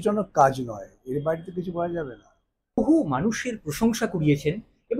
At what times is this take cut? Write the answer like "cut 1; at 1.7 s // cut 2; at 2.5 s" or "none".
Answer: cut 1; at 2.8 s